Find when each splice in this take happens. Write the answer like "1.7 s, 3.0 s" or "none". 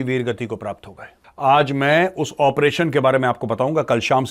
1.2 s